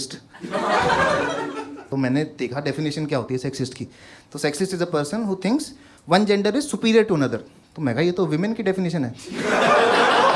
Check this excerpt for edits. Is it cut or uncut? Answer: cut